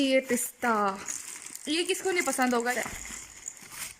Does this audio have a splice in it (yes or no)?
yes